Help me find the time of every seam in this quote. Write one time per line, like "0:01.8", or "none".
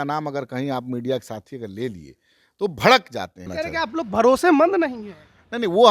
0:03.5